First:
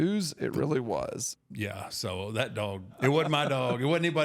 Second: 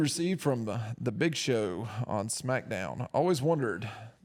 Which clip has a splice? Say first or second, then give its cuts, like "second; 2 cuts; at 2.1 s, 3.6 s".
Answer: first; 2 cuts; at 1.3 s, 2.9 s